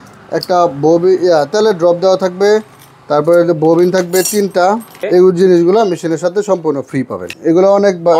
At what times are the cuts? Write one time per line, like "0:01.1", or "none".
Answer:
0:04.9
0:07.2